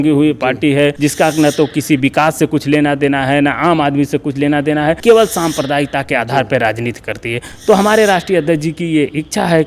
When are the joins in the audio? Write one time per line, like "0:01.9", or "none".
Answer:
0:01.0
0:05.0